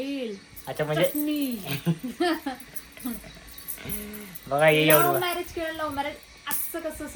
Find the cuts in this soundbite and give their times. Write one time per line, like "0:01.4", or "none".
none